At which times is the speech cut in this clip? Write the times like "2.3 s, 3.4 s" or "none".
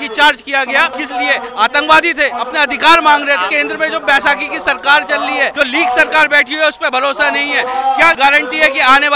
0.9 s, 2.3 s, 3.5 s, 5.5 s, 8.2 s